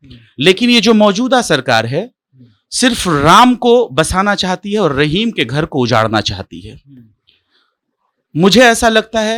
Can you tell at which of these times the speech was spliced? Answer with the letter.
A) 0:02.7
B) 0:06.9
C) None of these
C